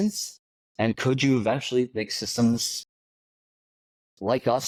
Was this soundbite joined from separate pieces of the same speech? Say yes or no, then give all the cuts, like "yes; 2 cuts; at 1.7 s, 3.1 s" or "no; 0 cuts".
no; 0 cuts